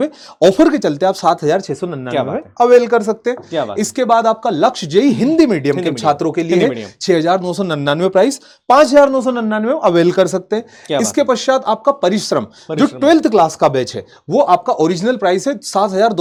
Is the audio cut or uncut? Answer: uncut